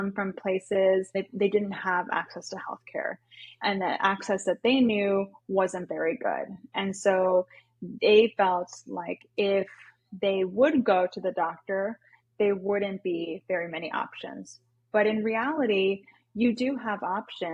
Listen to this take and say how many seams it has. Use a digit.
1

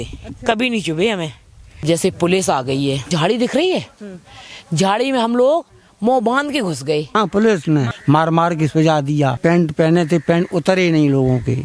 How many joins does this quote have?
5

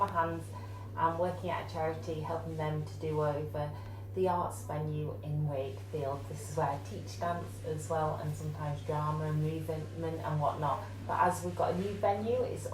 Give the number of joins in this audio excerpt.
0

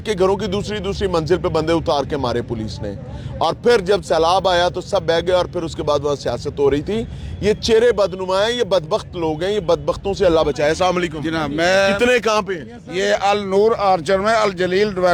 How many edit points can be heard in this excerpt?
0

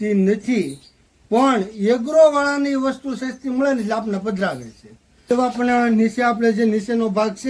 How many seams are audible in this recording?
1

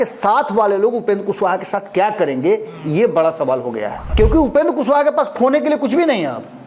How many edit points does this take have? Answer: 1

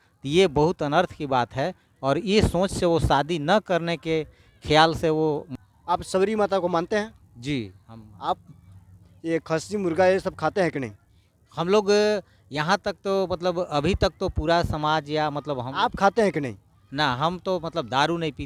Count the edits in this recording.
1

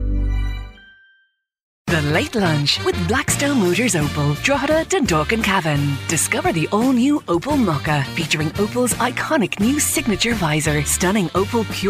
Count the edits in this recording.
1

